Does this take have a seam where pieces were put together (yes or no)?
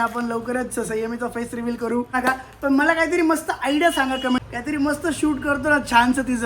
yes